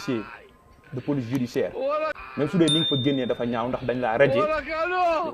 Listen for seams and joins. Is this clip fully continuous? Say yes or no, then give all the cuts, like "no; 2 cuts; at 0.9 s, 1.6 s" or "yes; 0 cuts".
no; 1 cut; at 2.2 s